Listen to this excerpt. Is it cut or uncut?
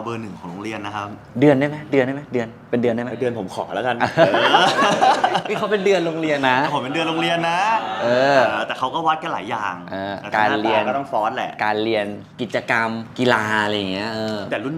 uncut